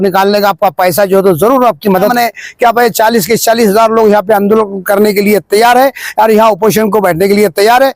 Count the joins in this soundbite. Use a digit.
1